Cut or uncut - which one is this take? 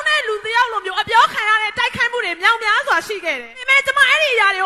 uncut